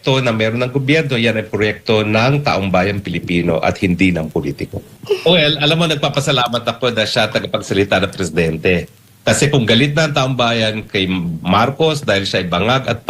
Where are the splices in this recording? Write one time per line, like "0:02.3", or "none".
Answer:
0:04.9